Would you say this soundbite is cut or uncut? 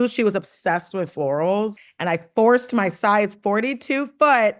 cut